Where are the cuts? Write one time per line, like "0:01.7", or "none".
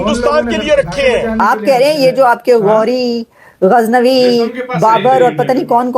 0:01.3